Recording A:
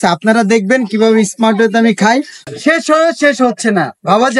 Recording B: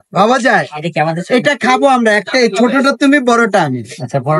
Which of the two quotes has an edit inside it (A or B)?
A